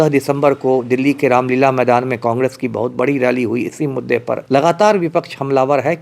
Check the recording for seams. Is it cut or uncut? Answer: cut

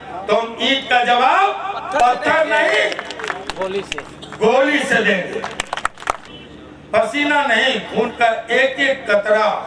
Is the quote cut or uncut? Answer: cut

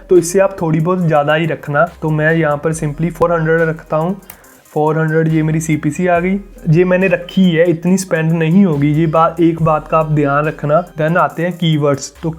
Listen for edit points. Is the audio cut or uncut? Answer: uncut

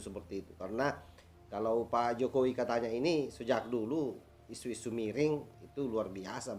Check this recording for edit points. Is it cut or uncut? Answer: uncut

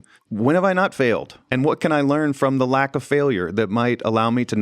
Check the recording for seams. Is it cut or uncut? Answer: cut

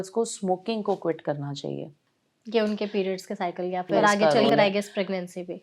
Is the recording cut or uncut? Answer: cut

